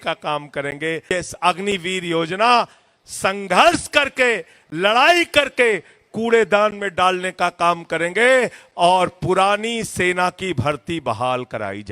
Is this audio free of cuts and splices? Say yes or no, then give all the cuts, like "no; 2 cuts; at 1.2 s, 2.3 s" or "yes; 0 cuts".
no; 1 cut; at 1.0 s